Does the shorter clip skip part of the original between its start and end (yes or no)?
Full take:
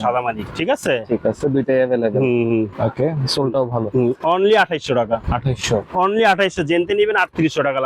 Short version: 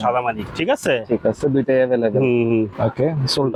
no